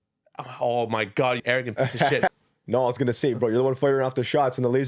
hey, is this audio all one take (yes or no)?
no